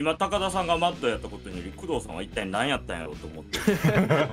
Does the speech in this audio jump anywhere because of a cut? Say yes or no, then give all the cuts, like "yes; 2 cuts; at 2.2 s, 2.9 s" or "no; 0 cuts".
no; 0 cuts